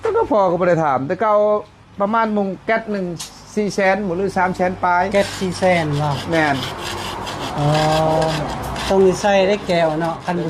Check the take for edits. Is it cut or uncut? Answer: uncut